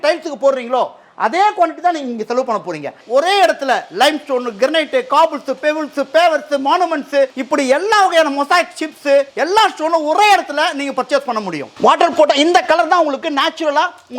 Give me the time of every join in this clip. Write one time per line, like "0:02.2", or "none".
0:03.0
0:07.4
0:09.3
0:11.6